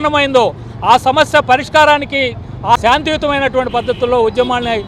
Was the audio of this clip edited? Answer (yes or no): yes